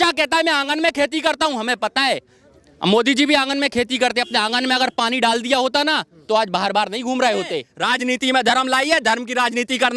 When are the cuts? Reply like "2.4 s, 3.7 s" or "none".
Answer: 7.7 s